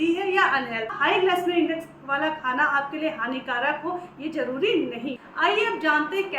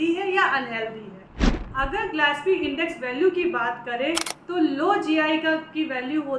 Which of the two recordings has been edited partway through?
first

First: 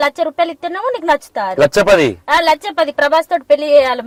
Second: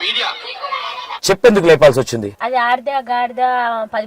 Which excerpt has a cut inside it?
second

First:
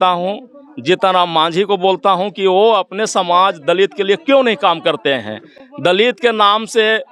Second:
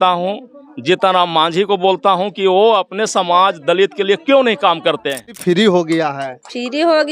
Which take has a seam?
second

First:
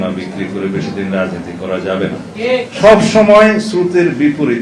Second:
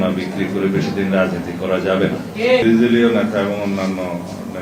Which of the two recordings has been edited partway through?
first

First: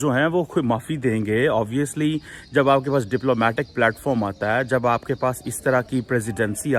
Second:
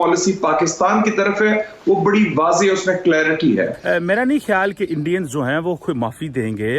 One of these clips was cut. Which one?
second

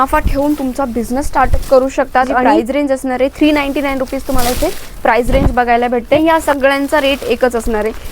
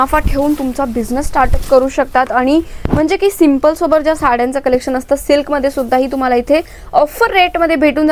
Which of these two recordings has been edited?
first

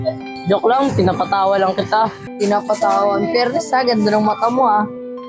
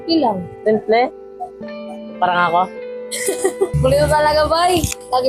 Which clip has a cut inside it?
first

